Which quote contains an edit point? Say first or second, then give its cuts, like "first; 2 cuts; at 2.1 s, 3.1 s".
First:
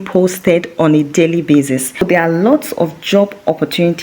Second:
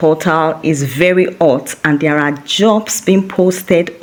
first; 1 cut; at 2.0 s